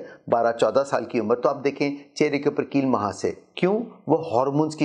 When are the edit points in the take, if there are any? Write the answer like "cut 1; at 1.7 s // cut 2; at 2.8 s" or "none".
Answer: none